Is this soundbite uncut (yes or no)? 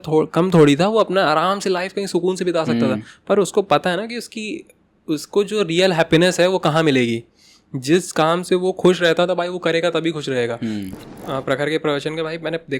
no